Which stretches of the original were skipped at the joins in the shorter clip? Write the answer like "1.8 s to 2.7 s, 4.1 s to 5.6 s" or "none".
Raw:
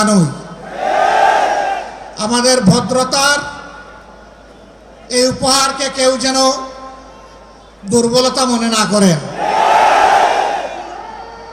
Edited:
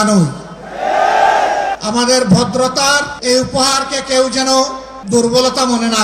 1.8 s to 2.1 s, 3.5 s to 5.0 s, 6.8 s to 7.7 s